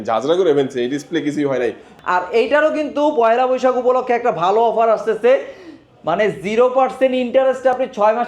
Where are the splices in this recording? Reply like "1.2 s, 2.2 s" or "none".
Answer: 1.9 s